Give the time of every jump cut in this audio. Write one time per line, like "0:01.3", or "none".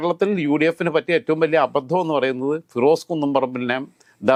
none